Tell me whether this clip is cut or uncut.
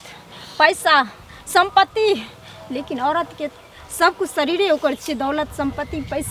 uncut